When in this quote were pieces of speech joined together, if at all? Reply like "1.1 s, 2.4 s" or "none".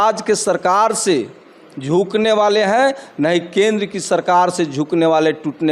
none

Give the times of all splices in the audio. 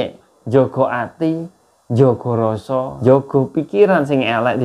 2.9 s

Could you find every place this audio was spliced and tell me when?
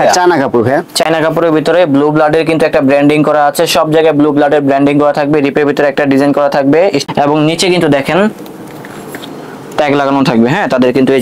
none

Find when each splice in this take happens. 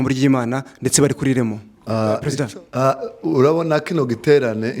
2.3 s

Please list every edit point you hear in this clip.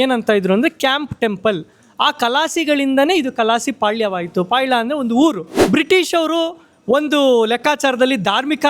5.5 s

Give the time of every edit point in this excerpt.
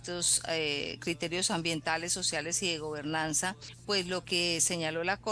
3.7 s

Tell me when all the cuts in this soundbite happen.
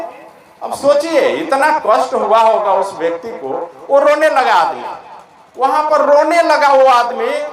none

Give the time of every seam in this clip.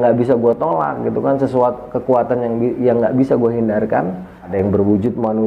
4.5 s

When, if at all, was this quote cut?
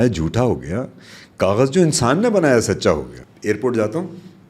3.1 s

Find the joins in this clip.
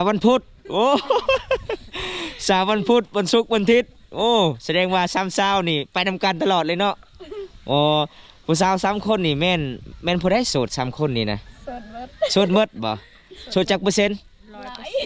none

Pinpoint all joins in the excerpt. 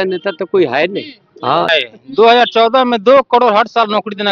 1.7 s

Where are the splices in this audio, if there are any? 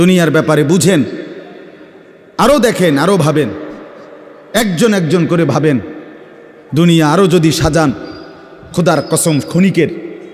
none

